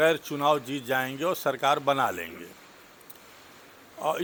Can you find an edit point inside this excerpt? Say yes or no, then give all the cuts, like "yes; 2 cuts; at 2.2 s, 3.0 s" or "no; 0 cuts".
no; 0 cuts